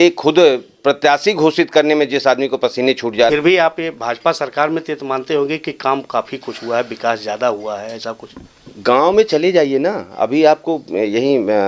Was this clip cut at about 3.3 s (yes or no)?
yes